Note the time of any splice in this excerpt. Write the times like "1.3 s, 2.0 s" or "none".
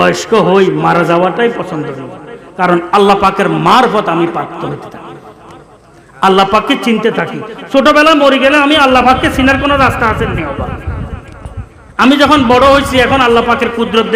none